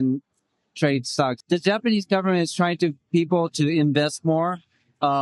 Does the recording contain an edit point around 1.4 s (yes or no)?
yes